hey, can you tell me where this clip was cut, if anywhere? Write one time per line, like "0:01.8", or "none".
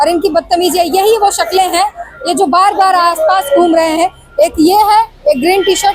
none